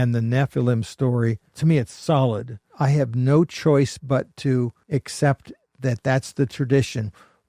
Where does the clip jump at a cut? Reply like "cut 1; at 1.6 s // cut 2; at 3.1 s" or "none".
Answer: cut 1; at 1.5 s // cut 2; at 2.7 s // cut 3; at 4.8 s